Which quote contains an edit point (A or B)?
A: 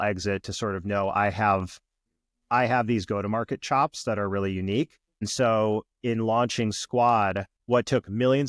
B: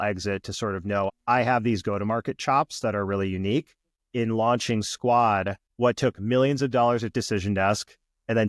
B